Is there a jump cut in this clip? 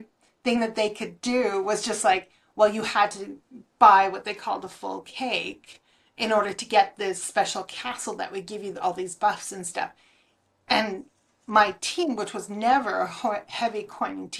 no; 0 cuts

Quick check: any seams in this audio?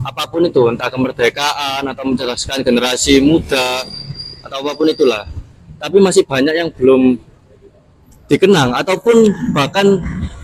no; 0 cuts

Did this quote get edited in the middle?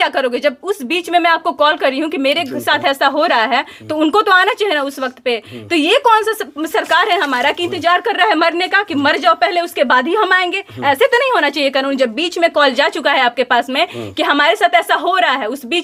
no; 0 cuts

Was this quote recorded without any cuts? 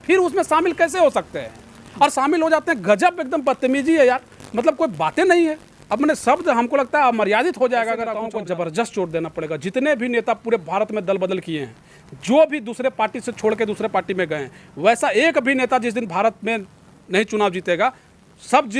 no; 1 cut; at 8.2 s

